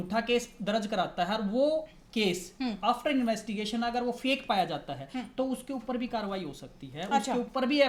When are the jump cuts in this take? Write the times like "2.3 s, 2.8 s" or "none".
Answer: none